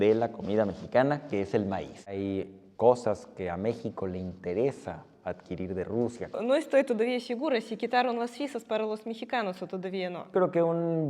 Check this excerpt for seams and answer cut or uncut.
cut